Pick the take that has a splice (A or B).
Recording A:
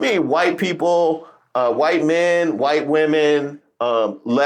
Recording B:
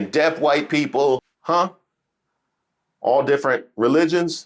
B